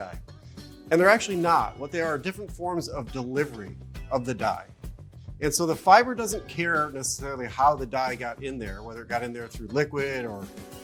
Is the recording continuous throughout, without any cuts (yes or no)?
yes